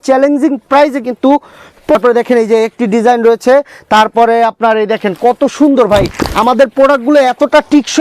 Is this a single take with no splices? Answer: no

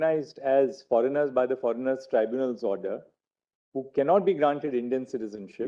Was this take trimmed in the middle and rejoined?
no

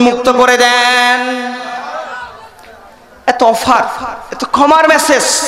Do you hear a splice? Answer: yes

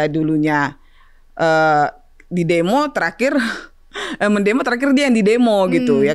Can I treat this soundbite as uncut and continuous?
yes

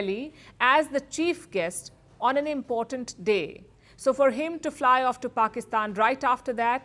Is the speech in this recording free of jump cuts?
yes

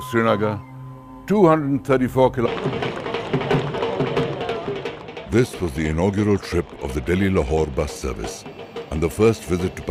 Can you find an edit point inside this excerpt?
no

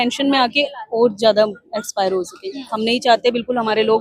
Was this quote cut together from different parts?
no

